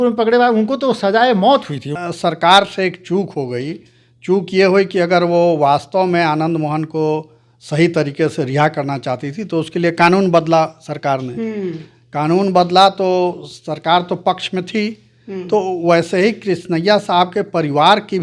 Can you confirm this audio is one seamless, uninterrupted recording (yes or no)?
no